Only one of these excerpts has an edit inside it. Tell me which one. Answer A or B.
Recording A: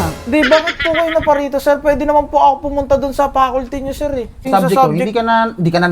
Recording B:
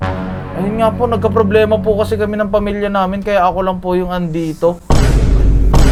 A